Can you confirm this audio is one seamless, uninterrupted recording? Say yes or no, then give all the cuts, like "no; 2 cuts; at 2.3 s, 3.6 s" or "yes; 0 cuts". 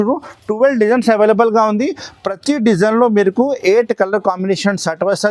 yes; 0 cuts